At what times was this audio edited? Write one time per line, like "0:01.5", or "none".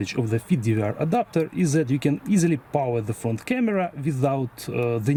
none